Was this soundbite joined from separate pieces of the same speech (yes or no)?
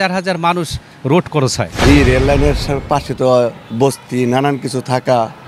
yes